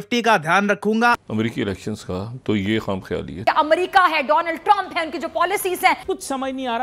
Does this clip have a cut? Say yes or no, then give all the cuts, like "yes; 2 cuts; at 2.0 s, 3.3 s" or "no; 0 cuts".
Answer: yes; 3 cuts; at 1.2 s, 3.3 s, 6.0 s